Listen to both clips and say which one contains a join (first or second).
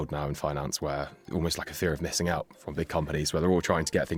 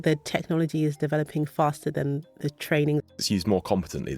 second